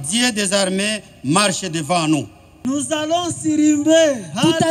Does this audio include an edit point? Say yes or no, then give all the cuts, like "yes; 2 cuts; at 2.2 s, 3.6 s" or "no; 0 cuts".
yes; 1 cut; at 2.6 s